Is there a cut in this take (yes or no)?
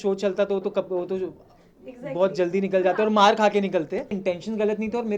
yes